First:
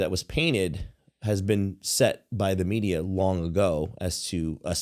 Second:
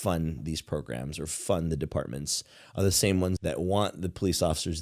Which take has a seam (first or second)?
second